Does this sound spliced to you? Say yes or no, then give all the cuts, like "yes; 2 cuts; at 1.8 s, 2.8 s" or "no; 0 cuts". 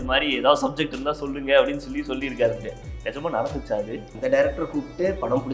yes; 1 cut; at 4.1 s